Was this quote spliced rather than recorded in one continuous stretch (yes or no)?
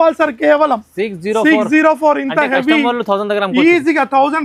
no